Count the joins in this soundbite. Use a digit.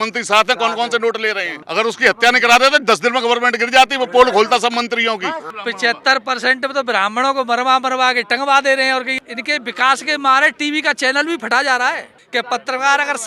4